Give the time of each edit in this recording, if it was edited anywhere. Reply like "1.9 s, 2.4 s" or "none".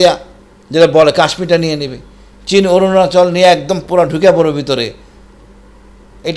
none